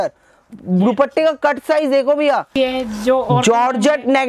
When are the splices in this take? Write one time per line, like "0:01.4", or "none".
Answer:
0:02.6

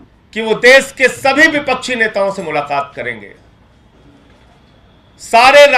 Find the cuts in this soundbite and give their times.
none

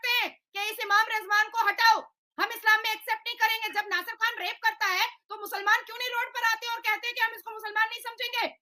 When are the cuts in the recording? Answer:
none

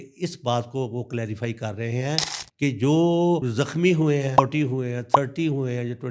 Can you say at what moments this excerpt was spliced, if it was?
none

